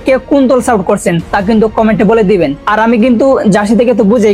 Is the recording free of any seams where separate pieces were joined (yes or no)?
yes